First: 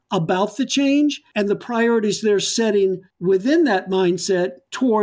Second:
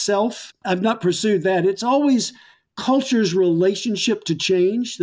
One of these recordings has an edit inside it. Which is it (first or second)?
first